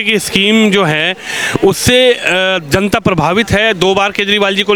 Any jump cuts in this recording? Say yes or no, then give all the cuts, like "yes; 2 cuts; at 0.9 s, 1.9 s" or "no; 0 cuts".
no; 0 cuts